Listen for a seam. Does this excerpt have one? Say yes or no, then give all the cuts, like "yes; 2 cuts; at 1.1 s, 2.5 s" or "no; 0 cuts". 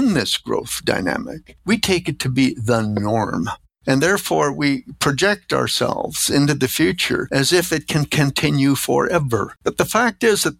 yes; 1 cut; at 9.5 s